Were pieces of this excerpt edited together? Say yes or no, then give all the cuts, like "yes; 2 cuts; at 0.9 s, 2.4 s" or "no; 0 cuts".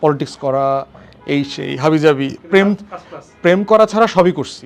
no; 0 cuts